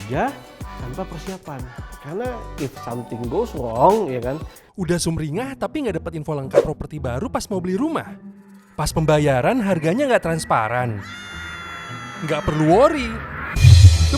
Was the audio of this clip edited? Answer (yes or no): yes